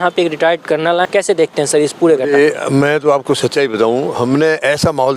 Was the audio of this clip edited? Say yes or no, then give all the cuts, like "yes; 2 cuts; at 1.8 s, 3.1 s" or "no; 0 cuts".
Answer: yes; 1 cut; at 1.1 s